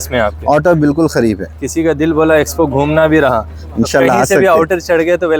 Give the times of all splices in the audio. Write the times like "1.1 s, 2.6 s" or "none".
none